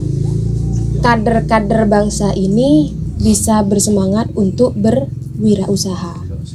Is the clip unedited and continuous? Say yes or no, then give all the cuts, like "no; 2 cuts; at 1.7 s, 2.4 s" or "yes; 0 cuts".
yes; 0 cuts